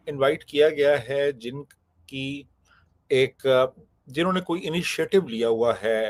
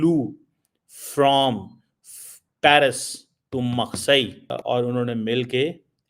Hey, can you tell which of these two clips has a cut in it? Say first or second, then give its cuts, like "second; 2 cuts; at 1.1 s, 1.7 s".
second; 1 cut; at 4.5 s